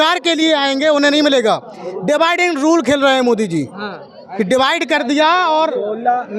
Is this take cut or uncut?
uncut